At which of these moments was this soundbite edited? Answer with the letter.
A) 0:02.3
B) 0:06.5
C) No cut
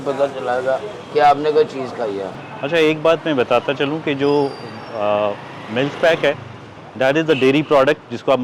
A